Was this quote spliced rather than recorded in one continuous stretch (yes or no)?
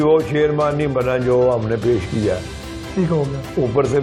no